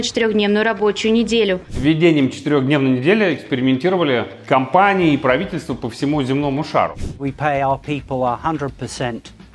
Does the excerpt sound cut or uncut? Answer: cut